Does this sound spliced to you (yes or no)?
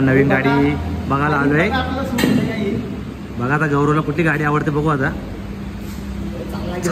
no